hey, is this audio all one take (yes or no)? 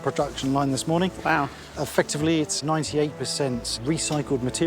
no